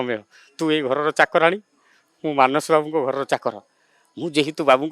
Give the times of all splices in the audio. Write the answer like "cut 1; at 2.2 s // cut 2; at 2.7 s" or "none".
none

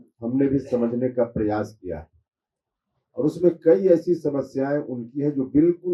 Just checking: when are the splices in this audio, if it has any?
none

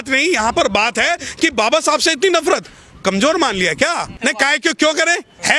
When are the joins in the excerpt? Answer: cut 1; at 4.1 s

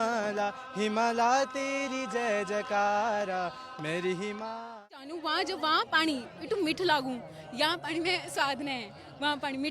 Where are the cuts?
cut 1; at 4.9 s

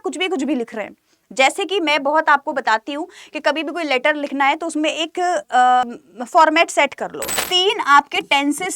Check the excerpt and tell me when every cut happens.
cut 1; at 7.2 s

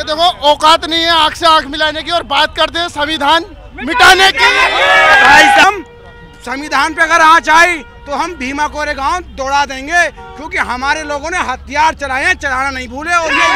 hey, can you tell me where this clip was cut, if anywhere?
cut 1; at 5.6 s

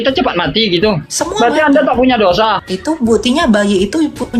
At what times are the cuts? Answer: cut 1; at 1.1 s // cut 2; at 2.7 s

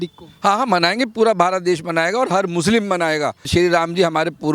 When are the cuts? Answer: cut 1; at 3.4 s

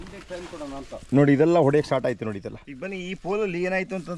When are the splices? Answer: none

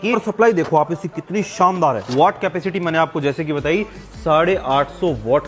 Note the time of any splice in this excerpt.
none

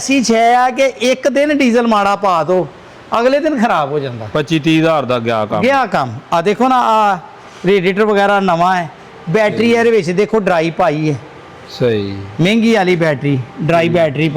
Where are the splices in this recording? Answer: none

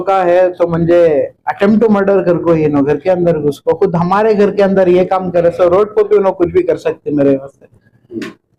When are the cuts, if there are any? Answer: none

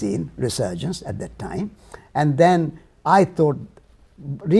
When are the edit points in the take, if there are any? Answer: cut 1; at 3.3 s

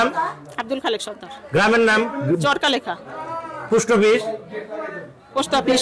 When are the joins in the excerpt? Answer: none

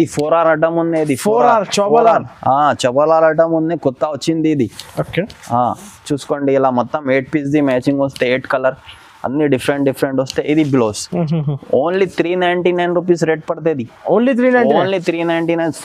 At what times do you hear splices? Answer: none

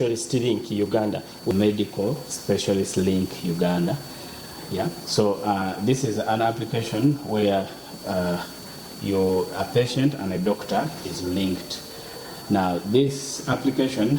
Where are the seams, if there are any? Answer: cut 1; at 1.5 s

